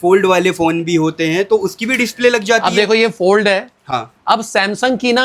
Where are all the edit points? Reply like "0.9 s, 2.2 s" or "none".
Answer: none